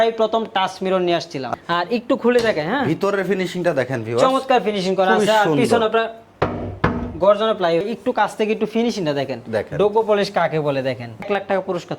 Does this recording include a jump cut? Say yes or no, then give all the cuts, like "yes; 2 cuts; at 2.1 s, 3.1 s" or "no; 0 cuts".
yes; 3 cuts; at 1.5 s, 7.9 s, 11.2 s